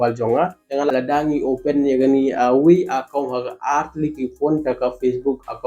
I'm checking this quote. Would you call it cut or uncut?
cut